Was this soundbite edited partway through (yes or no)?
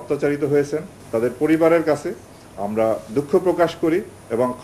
yes